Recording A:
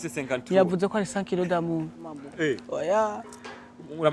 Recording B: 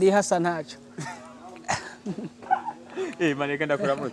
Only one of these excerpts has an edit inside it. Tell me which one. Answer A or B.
A